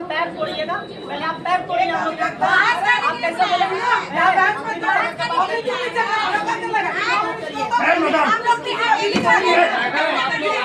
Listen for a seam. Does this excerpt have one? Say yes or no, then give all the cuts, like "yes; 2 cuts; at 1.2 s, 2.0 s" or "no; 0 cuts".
no; 0 cuts